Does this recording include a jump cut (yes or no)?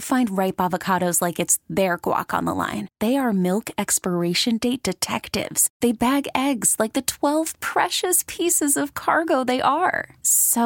no